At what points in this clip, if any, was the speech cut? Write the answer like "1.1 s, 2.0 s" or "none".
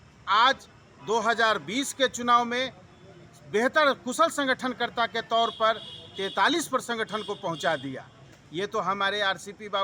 none